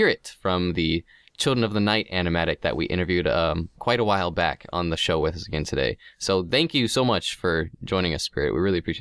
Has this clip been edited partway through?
yes; 1 cut; at 4.1 s

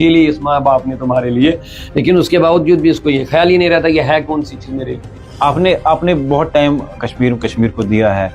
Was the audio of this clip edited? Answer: no; 0 cuts

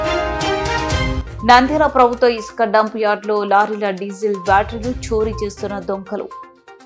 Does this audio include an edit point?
no; 0 cuts

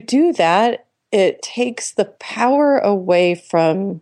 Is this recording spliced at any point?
yes; 1 cut; at 1.5 s

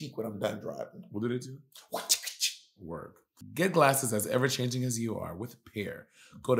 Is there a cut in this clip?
no; 0 cuts

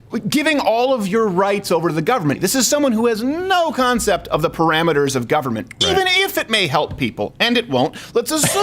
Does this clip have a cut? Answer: yes; 1 cut; at 2.4 s

